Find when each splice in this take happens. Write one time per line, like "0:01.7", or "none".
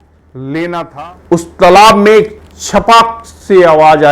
0:00.9